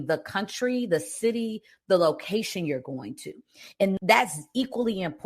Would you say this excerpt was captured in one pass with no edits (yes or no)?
yes